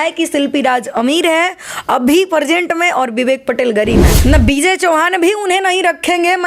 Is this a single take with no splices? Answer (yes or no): no